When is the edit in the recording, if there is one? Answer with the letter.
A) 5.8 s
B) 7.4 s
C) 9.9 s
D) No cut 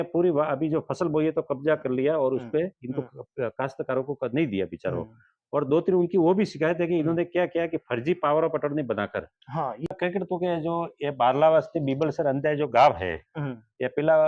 C